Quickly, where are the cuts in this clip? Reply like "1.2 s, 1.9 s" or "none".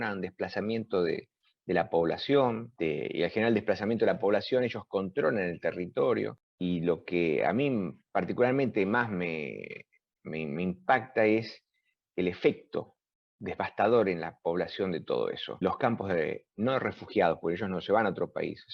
2.7 s, 6.4 s, 15.6 s